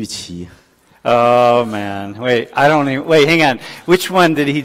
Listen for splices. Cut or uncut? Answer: uncut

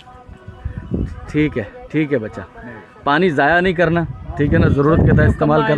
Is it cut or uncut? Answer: uncut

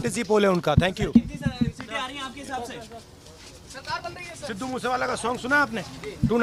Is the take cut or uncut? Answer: uncut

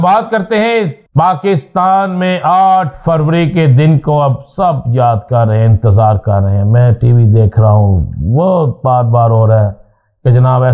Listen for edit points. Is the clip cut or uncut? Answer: cut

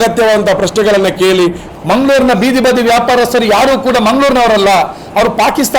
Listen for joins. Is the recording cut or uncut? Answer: cut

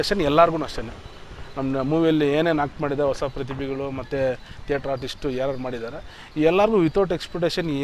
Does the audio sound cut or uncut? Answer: uncut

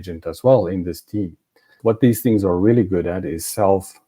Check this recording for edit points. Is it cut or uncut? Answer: cut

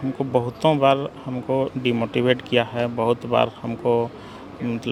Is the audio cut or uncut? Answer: uncut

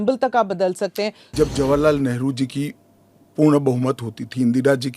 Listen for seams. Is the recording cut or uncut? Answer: cut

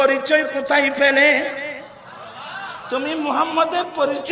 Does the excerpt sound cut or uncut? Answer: uncut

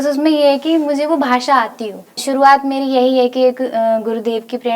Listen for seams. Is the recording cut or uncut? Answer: cut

